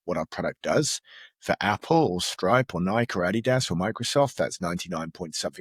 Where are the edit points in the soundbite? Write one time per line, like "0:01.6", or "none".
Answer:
none

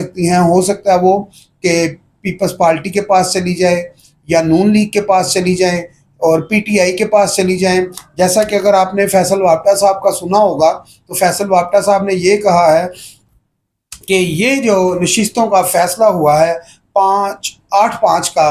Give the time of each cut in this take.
none

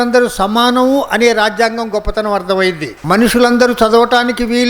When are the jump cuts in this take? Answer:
0:02.9

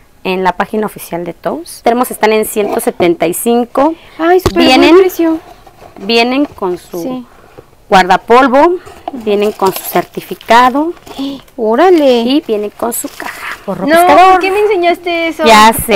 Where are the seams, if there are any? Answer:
0:01.7
0:13.7

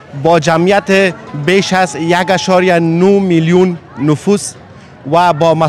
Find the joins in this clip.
none

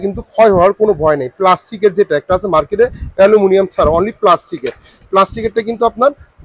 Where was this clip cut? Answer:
none

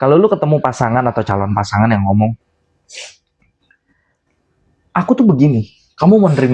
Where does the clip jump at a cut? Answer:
none

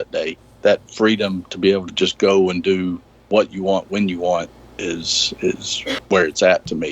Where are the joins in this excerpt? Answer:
0:06.0

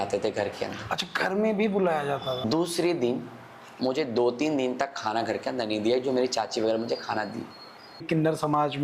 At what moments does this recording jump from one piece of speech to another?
0:02.4
0:08.0

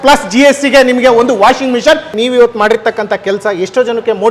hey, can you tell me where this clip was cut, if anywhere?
0:02.1

